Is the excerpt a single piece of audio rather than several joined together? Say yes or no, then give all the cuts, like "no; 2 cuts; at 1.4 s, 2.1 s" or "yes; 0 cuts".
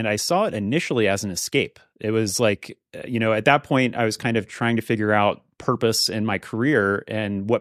yes; 0 cuts